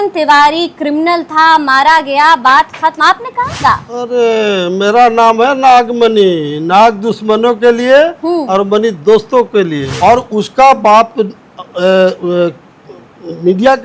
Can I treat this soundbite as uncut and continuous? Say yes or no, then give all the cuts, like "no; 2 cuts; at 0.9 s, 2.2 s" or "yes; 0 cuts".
no; 2 cuts; at 3.6 s, 9.9 s